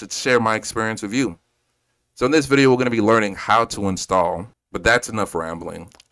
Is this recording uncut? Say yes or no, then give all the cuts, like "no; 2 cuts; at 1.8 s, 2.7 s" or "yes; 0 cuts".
no; 1 cut; at 4.6 s